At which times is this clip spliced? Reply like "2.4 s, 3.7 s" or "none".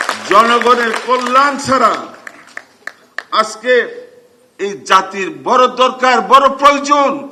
none

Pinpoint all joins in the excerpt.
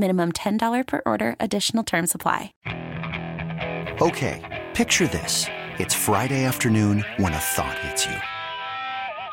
2.5 s

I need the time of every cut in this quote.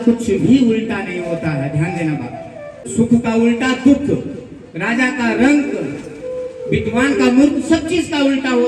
none

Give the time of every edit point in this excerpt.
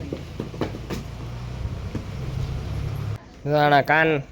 3.2 s

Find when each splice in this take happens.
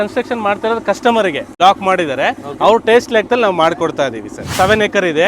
1.5 s, 4.4 s

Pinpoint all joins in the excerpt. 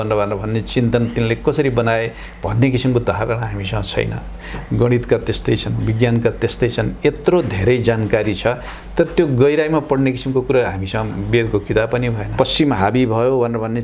12.2 s

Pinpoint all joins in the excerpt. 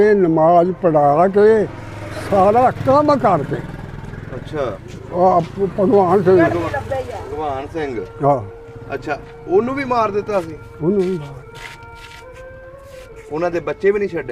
4.9 s

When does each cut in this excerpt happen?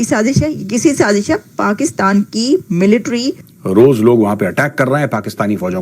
3.5 s

